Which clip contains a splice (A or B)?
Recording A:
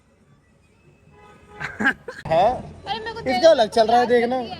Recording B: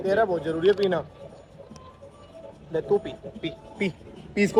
A